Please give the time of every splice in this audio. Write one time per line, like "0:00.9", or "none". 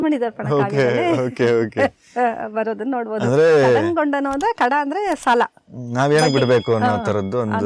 none